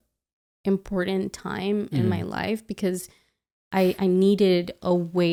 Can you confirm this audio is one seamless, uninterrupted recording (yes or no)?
yes